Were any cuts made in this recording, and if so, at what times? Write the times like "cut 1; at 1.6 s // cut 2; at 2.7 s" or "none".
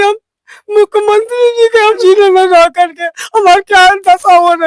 cut 1; at 2.0 s